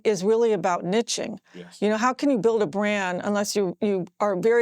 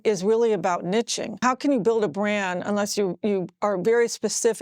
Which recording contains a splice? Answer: second; 1 cut; at 1.4 s

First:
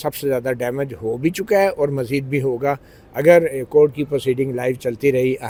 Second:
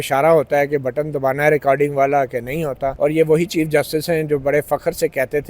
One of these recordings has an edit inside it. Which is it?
second; 1 cut; at 2.9 s

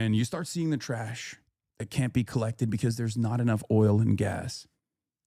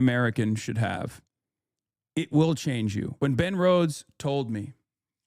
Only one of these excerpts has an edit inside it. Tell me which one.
second; 1 cut; at 3.1 s

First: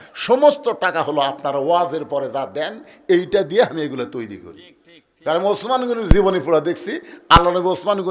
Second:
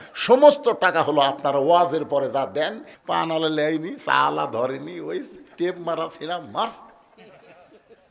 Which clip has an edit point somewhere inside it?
second; 1 cut; at 2.9 s

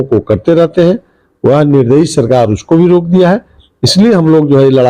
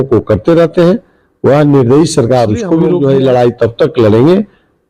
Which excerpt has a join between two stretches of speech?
second; 1 cut; at 2.9 s

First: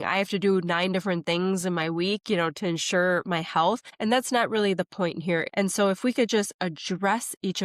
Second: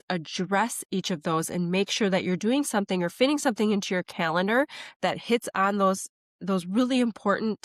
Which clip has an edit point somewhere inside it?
first; 2 cuts; at 3.9 s, 5.5 s

